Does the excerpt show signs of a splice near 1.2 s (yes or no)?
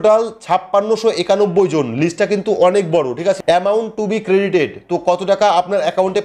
no